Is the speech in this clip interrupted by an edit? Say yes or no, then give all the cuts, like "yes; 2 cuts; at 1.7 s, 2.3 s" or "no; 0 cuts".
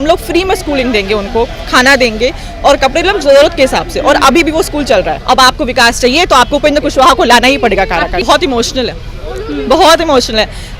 yes; 2 cuts; at 5.2 s, 8.2 s